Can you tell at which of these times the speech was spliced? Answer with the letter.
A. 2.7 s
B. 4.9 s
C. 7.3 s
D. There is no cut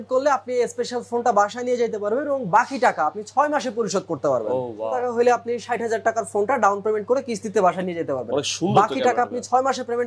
B